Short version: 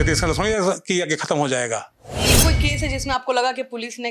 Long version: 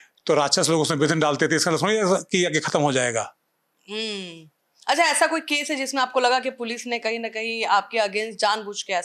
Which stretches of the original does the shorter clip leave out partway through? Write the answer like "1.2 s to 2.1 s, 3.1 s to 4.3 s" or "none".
3.9 s to 5.3 s